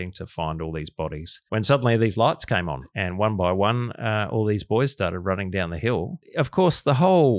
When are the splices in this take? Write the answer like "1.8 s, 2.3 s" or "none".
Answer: 1.3 s, 2.8 s, 6.2 s